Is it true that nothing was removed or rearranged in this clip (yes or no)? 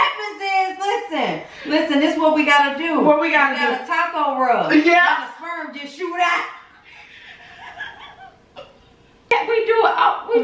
no